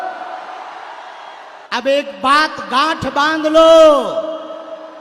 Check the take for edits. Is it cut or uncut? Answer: cut